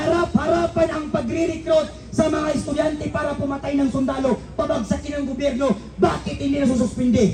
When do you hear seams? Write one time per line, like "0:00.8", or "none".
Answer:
none